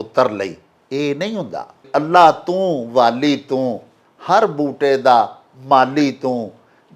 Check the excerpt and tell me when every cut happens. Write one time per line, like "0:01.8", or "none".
0:01.8